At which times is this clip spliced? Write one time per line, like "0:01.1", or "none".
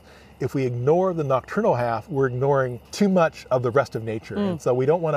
0:02.9